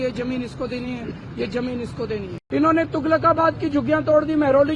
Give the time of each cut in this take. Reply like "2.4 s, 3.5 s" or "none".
2.3 s